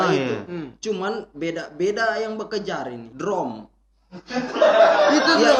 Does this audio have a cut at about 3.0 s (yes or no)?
yes